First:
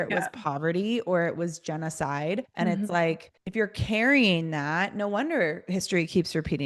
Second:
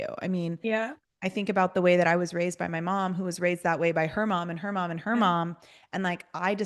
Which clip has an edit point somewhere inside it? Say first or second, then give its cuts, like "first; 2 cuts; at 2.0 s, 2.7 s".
first; 2 cuts; at 2.5 s, 3.3 s